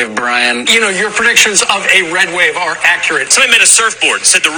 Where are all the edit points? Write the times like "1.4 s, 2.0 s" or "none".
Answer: none